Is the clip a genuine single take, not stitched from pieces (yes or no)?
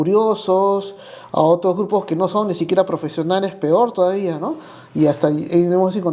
yes